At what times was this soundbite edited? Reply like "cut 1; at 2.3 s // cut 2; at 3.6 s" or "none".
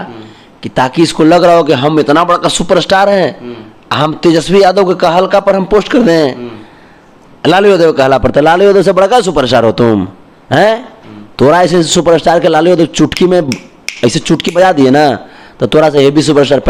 none